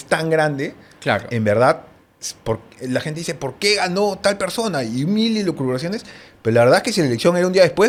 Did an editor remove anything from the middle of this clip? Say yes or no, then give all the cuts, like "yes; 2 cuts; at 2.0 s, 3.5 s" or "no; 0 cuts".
no; 0 cuts